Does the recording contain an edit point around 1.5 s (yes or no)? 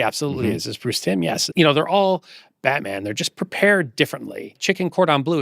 yes